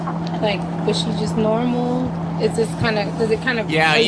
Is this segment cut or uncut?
uncut